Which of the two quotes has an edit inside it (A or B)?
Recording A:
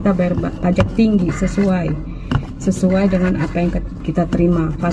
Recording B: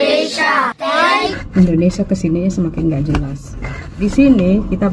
B